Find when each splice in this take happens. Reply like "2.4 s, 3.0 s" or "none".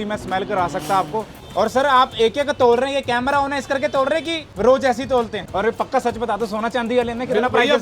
1.4 s, 4.4 s, 5.4 s